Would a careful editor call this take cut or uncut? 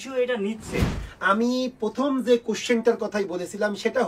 cut